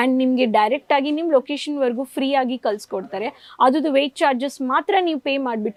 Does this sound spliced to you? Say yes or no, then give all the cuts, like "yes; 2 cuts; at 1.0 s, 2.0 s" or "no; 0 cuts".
no; 0 cuts